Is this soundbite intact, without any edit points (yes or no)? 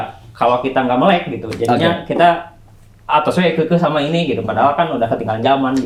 yes